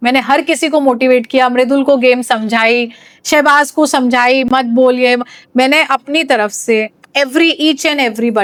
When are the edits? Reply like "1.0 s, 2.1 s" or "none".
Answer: none